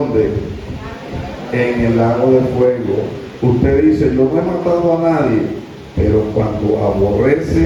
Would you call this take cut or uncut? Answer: uncut